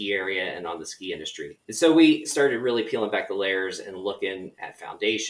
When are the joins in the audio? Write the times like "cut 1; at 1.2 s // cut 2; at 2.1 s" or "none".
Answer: cut 1; at 2.3 s